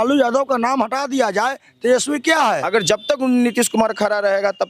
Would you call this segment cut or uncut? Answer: cut